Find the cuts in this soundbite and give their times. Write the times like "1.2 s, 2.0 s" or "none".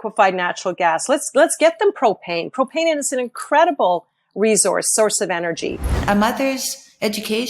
6.0 s